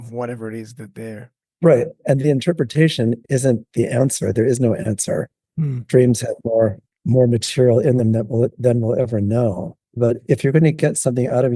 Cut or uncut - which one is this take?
cut